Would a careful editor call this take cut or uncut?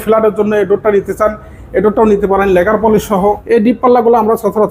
cut